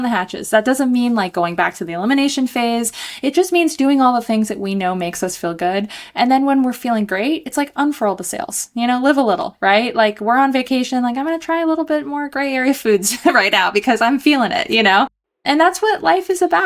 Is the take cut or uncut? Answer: cut